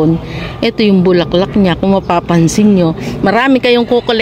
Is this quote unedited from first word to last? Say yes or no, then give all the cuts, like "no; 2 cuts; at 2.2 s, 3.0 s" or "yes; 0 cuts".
yes; 0 cuts